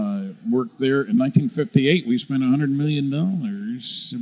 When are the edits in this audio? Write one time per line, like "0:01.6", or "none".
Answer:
0:02.4